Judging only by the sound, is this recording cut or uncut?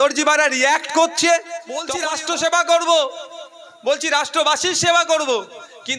cut